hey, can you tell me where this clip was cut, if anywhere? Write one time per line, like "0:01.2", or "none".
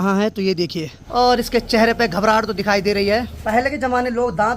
0:01.0
0:03.3